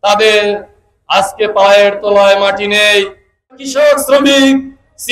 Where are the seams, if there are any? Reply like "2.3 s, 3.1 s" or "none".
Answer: 3.5 s